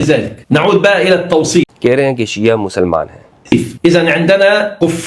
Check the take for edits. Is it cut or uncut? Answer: uncut